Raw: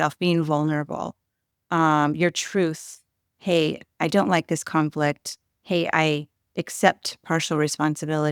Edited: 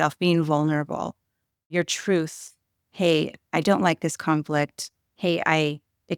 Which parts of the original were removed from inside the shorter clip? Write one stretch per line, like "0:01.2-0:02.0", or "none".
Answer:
0:01.7-0:02.2

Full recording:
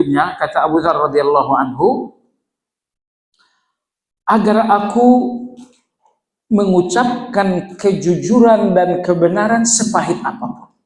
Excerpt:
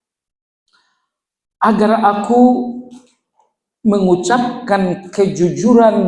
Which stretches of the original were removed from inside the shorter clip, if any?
none

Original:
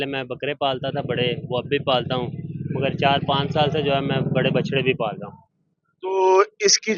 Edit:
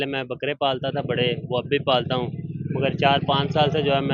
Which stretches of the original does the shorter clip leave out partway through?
none

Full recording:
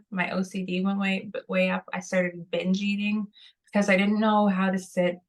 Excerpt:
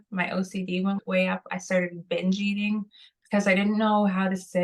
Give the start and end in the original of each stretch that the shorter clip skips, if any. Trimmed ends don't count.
0:01.0-0:01.4

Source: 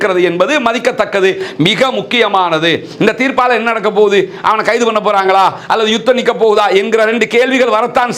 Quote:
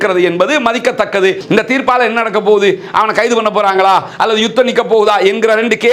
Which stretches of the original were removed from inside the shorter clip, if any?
0:01.4-0:02.9

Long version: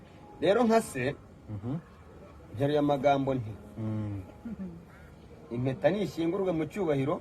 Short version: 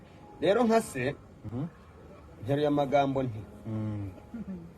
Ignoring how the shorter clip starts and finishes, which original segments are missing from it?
0:01.3-0:01.4

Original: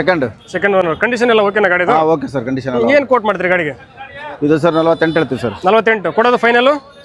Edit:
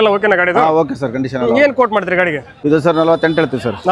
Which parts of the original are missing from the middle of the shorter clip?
0:03.8-0:04.2

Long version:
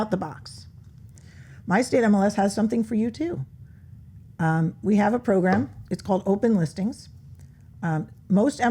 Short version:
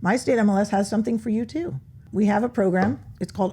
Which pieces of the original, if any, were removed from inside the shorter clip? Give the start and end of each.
0:03.7-0:04.8

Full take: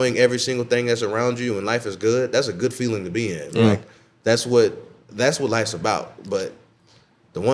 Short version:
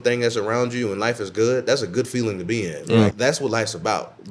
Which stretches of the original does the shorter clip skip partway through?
0:03.8-0:05.1

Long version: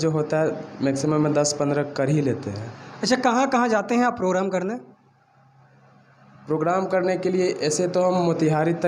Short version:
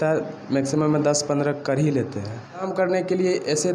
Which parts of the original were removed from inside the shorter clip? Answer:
0:02.9-0:06.8

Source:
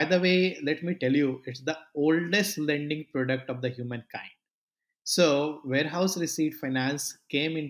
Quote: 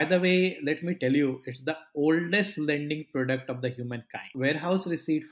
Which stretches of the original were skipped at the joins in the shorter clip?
0:04.3-0:05.6

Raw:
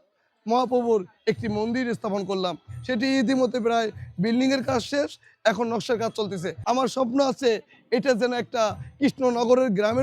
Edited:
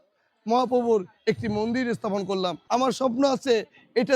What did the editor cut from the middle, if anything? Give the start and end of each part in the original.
0:02.6-0:06.6

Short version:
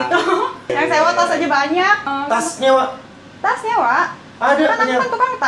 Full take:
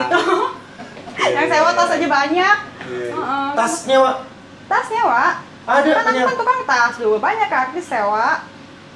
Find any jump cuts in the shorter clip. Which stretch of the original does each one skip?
0:00.7-0:01.3
0:02.7-0:03.3

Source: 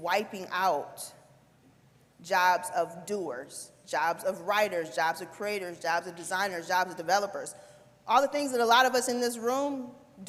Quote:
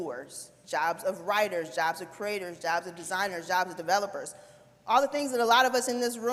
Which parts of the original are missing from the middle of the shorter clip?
none

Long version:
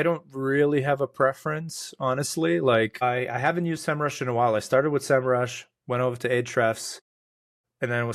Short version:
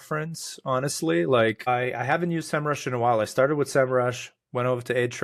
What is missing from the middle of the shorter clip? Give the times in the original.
none

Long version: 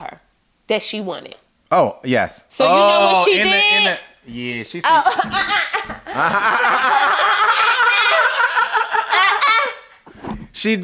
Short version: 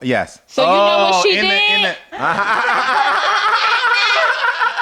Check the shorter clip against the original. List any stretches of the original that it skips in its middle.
0:04.1-0:06.0

